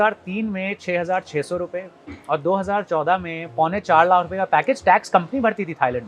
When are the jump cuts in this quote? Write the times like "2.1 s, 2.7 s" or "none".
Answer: none